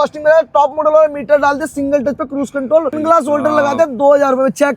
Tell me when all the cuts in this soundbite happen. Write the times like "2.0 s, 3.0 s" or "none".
3.0 s